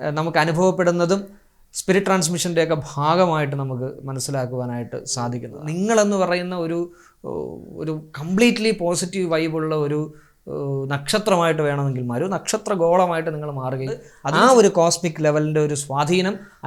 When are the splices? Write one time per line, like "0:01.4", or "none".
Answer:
0:05.5
0:14.2